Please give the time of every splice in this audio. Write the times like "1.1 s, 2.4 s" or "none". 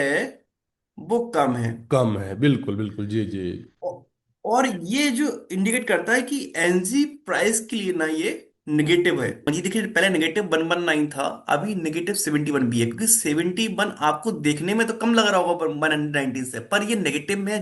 9.5 s